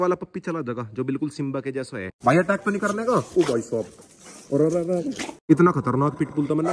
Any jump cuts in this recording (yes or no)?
yes